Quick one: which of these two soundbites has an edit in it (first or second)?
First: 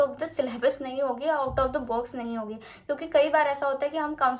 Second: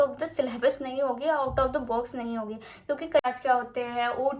second